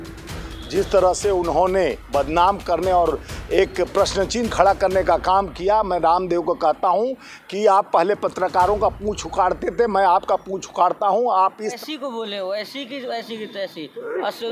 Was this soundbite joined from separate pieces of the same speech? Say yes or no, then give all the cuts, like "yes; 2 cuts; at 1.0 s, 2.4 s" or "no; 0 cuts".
yes; 1 cut; at 11.8 s